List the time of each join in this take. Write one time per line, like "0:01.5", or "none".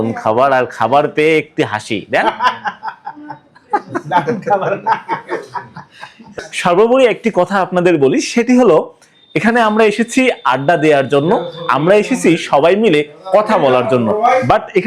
0:06.5